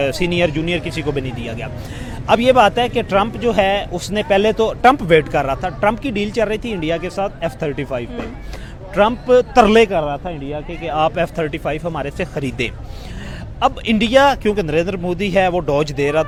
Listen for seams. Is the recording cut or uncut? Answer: uncut